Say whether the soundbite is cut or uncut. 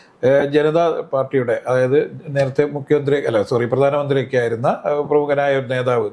uncut